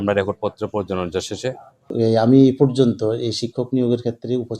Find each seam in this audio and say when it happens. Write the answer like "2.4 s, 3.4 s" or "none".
1.9 s